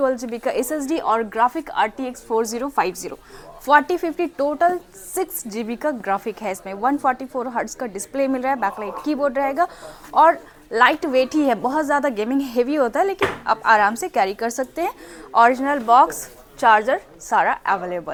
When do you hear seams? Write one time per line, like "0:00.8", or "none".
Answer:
none